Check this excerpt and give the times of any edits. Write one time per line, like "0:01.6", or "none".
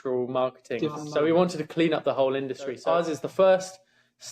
0:01.0
0:02.8

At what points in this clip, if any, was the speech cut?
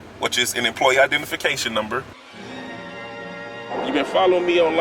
0:02.2

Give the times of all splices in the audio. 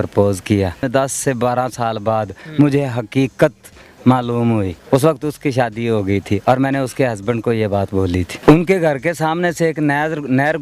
0:00.9
0:04.8
0:08.3

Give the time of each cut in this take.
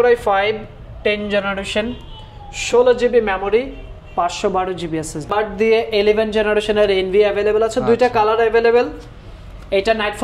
0:05.3

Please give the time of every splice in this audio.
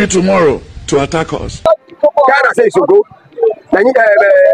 0:01.7

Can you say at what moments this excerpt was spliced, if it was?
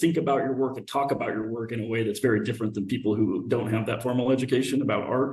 none

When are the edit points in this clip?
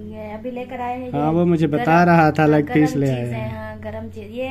none

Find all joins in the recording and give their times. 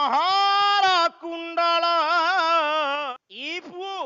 0:03.1

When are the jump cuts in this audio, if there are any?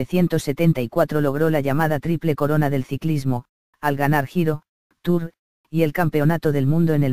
none

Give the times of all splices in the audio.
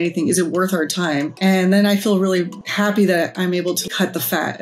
0:01.3
0:02.6
0:03.9

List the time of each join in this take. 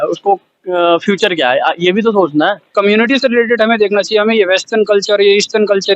0:02.7

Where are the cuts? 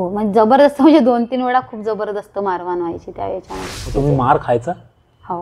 0:03.8

